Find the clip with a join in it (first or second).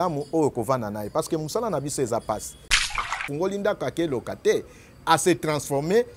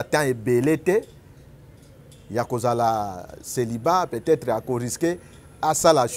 first